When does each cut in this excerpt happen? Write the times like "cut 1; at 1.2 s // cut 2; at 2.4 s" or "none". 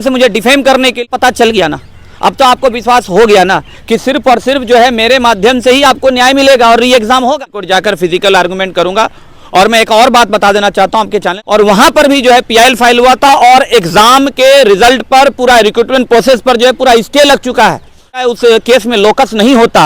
cut 1; at 1.1 s // cut 2; at 7.5 s // cut 3; at 11.3 s // cut 4; at 18.2 s